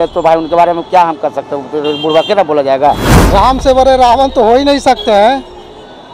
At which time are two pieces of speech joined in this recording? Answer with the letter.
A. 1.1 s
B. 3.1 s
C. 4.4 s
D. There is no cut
B